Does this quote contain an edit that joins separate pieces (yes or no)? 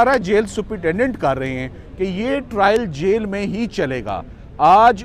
no